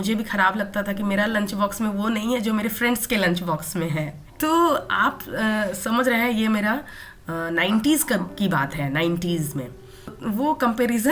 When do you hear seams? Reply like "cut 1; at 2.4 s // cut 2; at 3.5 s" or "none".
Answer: cut 1; at 10.1 s